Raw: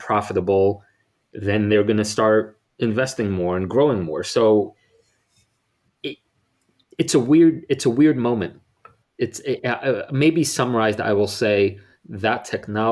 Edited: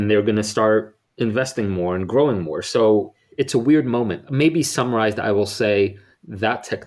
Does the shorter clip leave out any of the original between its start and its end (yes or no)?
yes